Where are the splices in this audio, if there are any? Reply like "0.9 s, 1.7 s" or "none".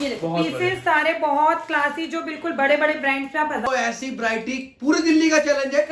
3.7 s

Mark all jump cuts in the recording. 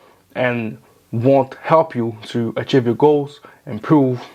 none

